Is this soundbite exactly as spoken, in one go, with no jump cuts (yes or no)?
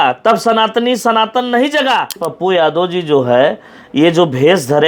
no